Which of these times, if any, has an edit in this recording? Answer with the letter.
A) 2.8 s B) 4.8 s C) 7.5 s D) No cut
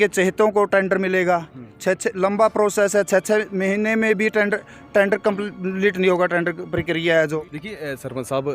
C